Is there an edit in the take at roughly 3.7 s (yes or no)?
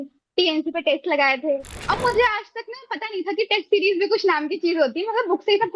no